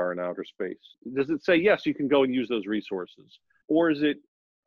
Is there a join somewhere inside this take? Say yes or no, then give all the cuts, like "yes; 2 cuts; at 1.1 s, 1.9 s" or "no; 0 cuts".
yes; 2 cuts; at 1.0 s, 3.6 s